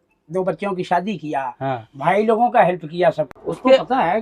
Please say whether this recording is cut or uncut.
cut